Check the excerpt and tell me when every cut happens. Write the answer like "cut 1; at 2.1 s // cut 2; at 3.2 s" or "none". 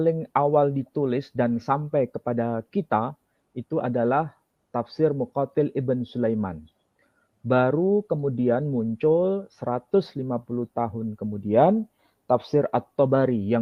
none